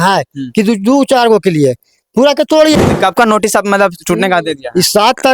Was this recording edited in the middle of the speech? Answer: yes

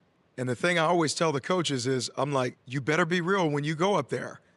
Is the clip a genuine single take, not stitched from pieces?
yes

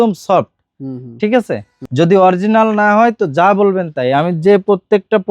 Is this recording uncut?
no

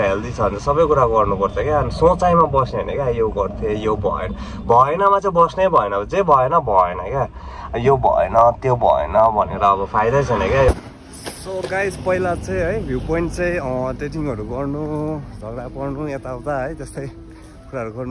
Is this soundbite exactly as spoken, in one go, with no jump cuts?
no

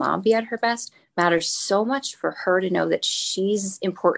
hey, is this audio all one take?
yes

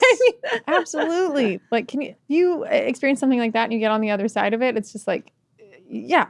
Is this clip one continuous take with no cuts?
no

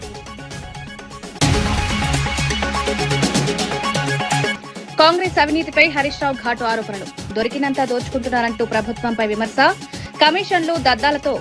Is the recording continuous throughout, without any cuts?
yes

